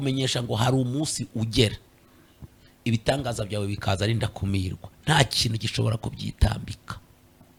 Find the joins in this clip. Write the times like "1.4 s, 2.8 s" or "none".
none